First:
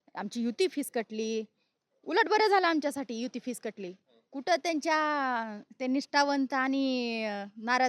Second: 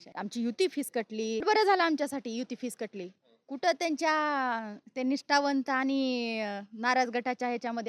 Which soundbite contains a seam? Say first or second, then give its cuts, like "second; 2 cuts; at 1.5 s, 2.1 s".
second; 1 cut; at 1.4 s